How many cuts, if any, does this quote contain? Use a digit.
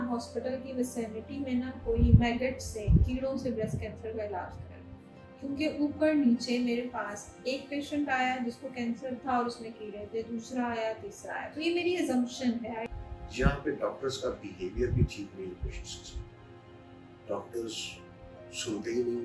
1